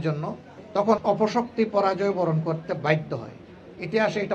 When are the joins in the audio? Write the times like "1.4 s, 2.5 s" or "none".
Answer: 1.0 s